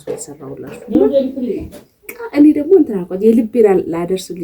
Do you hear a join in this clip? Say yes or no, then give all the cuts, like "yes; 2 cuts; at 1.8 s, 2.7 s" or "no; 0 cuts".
yes; 1 cut; at 1.7 s